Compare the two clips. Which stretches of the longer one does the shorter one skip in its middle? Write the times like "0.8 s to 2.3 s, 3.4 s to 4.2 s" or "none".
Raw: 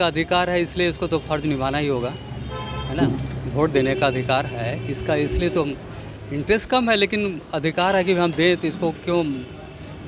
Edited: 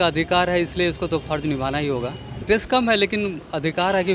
2.3 s to 6.3 s